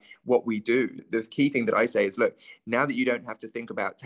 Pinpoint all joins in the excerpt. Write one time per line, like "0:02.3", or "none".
0:01.0